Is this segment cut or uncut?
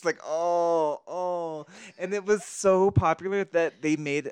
uncut